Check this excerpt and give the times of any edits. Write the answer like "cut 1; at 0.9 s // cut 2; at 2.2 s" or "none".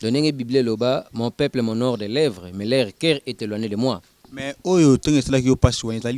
cut 1; at 4.2 s